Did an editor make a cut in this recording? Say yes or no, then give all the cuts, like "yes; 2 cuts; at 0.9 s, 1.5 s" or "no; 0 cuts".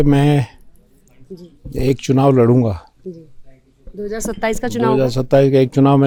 no; 0 cuts